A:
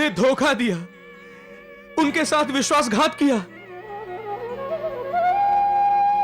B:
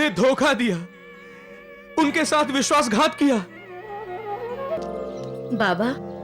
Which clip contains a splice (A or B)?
B